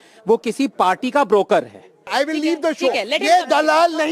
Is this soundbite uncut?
no; 1 cut; at 2.1 s

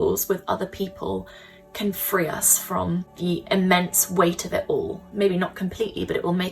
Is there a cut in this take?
yes; 2 cuts; at 3.1 s, 5.0 s

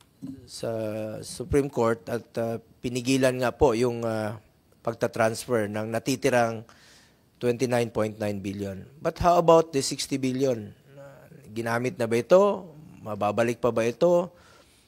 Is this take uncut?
yes; 0 cuts

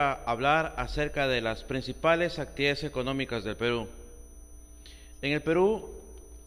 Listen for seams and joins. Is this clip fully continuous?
yes; 0 cuts

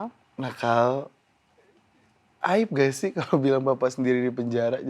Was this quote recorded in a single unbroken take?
yes; 0 cuts

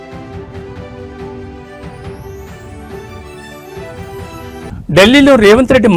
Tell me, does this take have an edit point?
yes; 1 cut; at 3.8 s

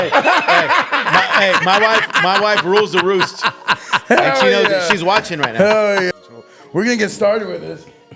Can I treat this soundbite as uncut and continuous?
no; 1 cut; at 6.1 s

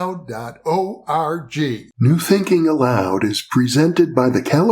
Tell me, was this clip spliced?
yes; 1 cut; at 1.9 s

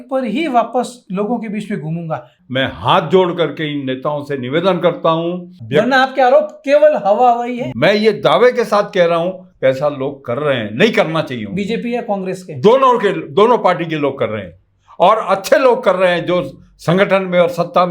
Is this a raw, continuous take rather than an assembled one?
no; 3 cuts; at 2.4 s, 5.5 s, 7.7 s

